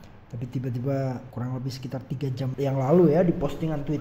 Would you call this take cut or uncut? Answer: cut